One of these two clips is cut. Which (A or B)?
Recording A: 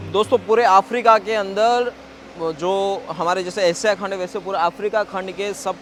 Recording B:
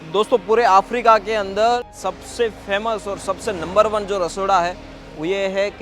B